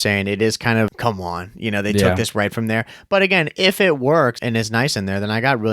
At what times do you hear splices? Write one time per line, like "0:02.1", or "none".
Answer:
0:00.9
0:04.4